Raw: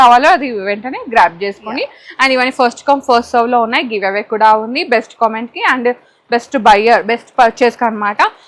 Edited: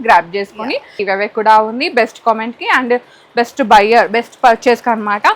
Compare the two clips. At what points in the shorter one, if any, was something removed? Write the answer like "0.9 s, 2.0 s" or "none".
1.0 s